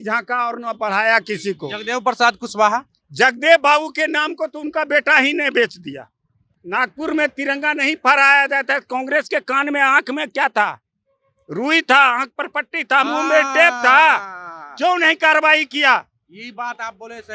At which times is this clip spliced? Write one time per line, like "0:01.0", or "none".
0:06.5